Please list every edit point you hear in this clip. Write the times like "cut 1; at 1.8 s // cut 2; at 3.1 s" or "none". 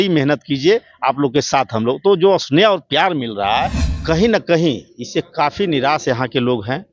cut 1; at 3.9 s